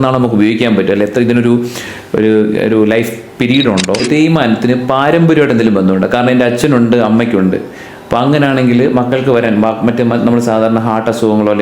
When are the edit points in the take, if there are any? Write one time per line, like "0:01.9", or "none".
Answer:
0:04.0